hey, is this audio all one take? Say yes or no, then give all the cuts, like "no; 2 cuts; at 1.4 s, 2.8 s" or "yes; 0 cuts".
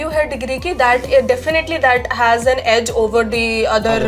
yes; 0 cuts